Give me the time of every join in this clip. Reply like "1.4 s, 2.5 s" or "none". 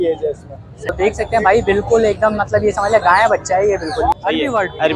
0.9 s, 4.1 s